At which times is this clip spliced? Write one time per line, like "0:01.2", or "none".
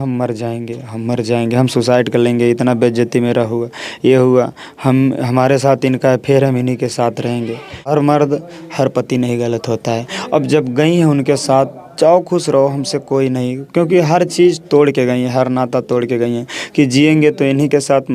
0:07.9